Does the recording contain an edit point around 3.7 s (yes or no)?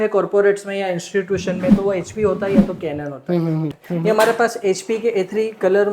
yes